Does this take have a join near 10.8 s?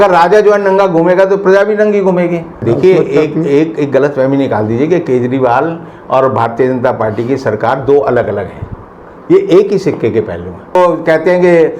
yes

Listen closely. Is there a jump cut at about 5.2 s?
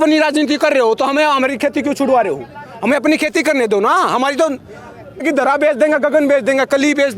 yes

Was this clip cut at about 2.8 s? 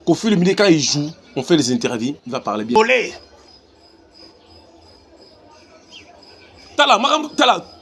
yes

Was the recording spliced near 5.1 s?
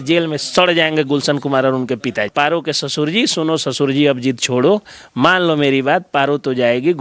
no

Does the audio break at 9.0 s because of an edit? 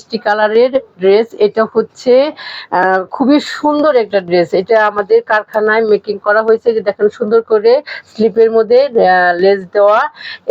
no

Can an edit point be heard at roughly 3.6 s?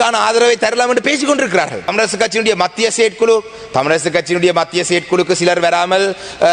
no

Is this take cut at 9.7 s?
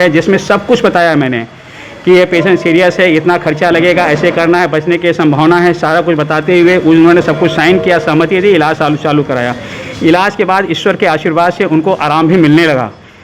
no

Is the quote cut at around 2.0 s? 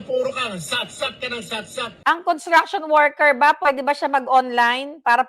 yes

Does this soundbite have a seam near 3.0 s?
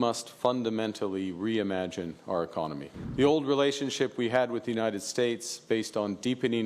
yes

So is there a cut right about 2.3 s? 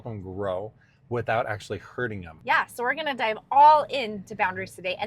yes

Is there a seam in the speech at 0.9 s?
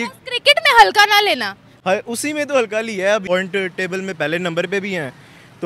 no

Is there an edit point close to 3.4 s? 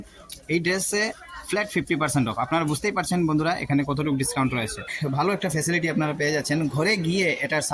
no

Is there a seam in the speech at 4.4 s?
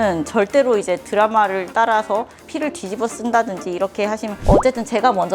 yes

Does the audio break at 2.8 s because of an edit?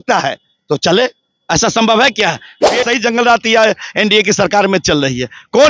yes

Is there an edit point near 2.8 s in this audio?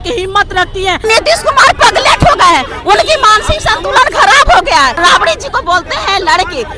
no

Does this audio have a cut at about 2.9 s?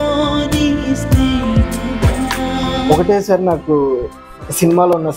yes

